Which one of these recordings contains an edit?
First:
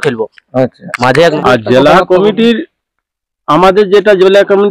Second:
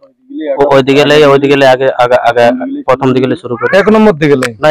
first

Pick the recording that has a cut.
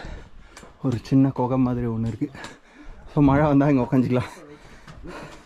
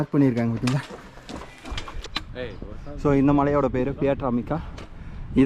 second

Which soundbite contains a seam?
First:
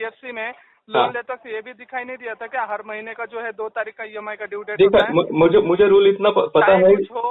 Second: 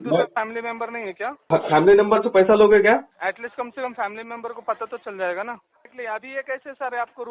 second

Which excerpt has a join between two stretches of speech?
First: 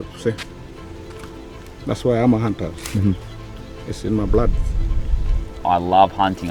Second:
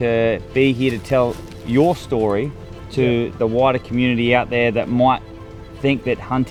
first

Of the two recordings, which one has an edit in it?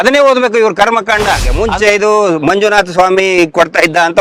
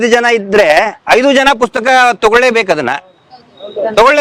first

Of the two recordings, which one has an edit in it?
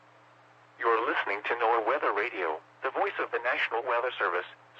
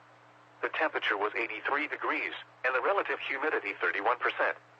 second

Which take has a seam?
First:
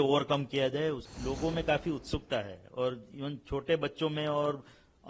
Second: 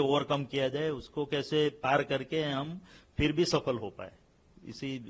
first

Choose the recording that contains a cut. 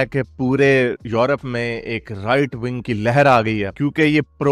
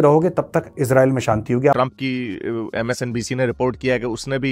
second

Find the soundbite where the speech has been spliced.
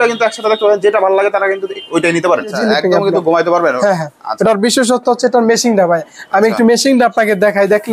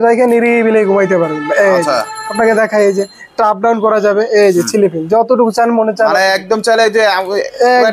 first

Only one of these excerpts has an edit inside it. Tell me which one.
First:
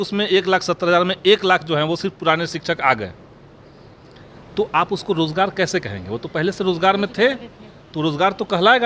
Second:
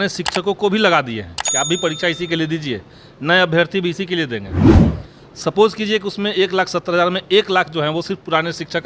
second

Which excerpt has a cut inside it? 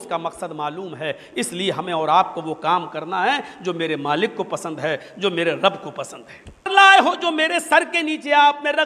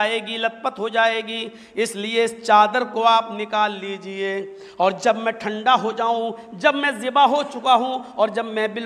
first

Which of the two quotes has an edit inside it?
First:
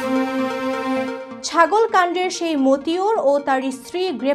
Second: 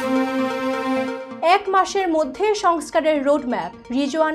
second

